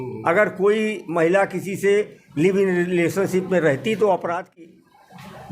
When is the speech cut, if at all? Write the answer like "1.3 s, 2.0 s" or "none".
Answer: 4.6 s